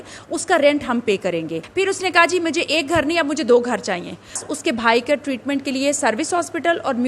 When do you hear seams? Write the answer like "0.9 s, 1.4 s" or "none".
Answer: 1.6 s, 4.4 s

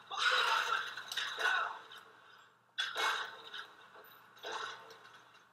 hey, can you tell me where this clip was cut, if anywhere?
none

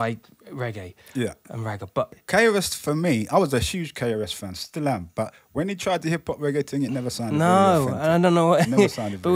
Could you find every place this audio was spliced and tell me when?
2.2 s

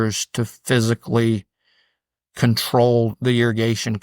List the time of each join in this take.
3.1 s

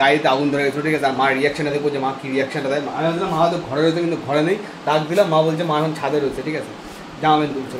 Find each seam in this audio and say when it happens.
none

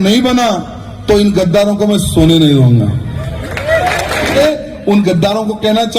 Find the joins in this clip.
4.4 s

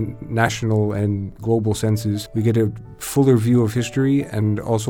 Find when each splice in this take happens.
1.3 s, 2.2 s

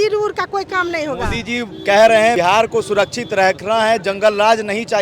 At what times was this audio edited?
2.4 s

